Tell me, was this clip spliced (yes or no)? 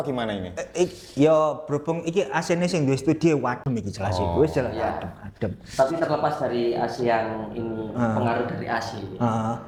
no